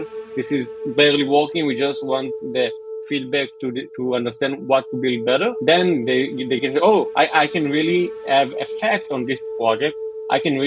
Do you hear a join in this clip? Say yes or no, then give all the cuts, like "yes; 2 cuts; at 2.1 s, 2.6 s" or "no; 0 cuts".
yes; 1 cut; at 2.9 s